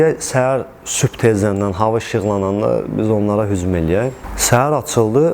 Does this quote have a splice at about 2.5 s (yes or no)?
no